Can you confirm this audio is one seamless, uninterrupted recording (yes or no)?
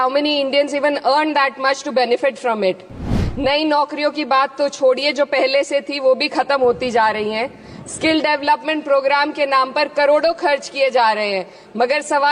no